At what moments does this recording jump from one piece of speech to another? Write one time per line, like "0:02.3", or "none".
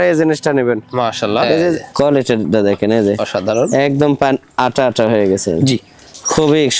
0:01.8